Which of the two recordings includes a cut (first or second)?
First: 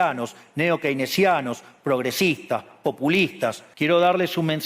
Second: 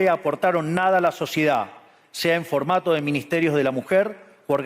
first